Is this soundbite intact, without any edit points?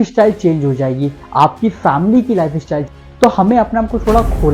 no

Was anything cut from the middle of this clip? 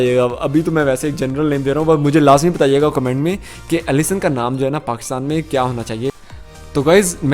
yes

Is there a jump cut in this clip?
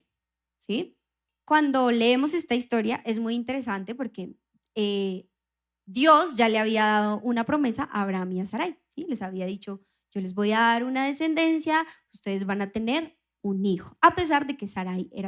yes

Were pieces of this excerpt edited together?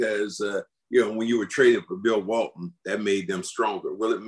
no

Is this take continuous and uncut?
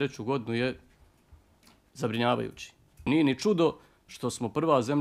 no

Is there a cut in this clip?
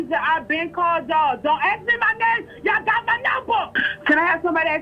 yes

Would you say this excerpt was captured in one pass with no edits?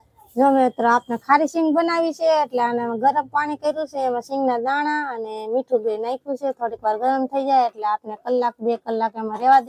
yes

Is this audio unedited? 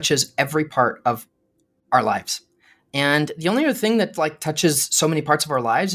yes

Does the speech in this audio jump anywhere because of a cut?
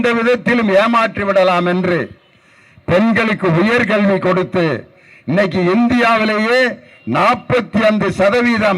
no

